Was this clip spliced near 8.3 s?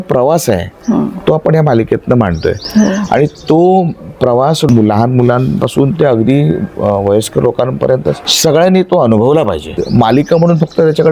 yes; 3 cuts; at 4.7 s, 8.3 s, 9.7 s

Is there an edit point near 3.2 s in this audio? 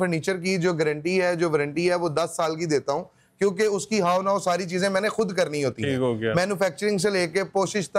no; 0 cuts

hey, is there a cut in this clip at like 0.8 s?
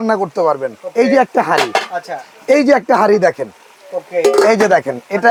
no; 0 cuts

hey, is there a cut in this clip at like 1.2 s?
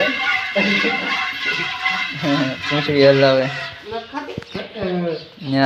no; 0 cuts

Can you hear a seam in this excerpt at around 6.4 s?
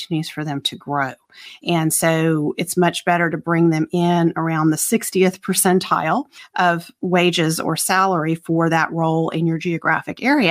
yes; 1 cut; at 6.4 s

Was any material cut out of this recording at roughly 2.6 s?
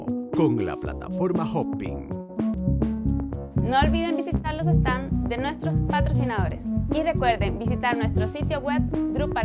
yes; 1 cut; at 2.6 s

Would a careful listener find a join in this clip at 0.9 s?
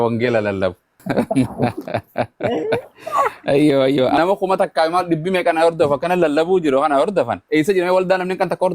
yes; 2 cuts; at 0.9 s, 4.2 s

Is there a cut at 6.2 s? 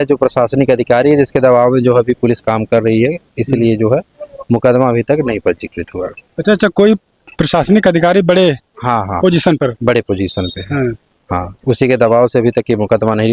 no; 0 cuts

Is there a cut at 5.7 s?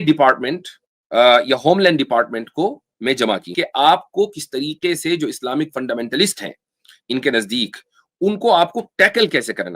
no; 1 cut; at 3.5 s

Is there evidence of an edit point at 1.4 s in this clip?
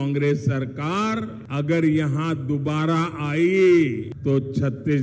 yes; 2 cuts; at 1.4 s, 4.1 s

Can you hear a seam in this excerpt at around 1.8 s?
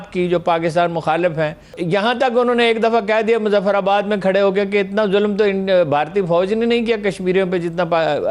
yes; 1 cut; at 1.8 s

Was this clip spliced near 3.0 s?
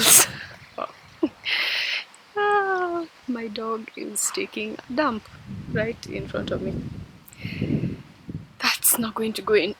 no; 0 cuts

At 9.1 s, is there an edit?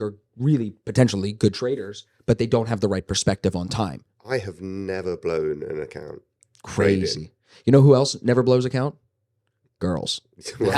no; 1 cut; at 4.0 s

